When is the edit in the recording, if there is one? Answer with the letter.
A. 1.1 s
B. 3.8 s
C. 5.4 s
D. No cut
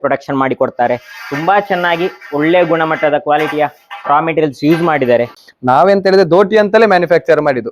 C